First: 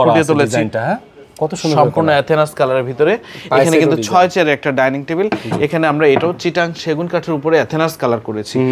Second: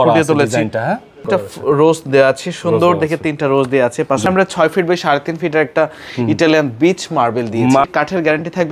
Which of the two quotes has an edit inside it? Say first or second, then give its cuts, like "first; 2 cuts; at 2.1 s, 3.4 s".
second; 3 cuts; at 1.2 s, 4.3 s, 7.8 s